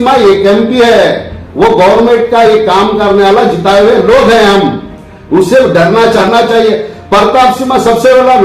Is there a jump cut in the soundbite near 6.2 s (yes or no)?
yes